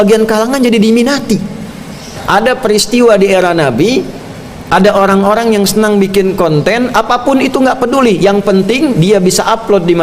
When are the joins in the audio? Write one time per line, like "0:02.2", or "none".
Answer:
0:02.2